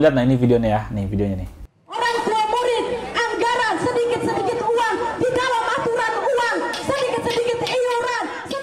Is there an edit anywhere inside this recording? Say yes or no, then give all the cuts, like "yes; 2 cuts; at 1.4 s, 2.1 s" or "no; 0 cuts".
no; 0 cuts